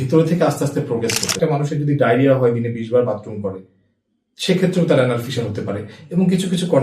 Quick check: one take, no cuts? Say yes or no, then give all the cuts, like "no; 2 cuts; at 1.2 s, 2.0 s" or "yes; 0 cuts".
no; 1 cut; at 1.4 s